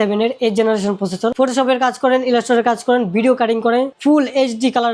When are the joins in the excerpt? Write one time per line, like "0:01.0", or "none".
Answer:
0:01.3